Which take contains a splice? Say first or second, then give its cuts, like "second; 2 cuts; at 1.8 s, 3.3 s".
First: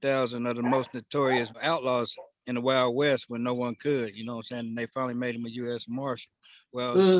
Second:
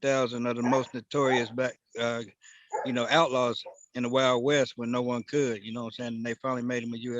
first; 1 cut; at 1.6 s